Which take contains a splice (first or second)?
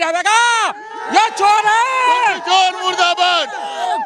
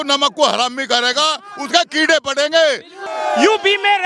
second